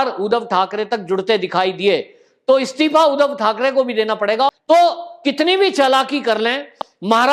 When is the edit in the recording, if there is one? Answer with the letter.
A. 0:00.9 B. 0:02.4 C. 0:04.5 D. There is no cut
C